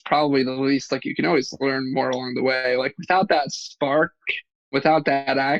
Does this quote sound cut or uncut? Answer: cut